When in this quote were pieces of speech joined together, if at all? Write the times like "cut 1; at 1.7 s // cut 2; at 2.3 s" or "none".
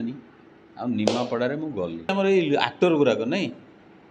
cut 1; at 2.1 s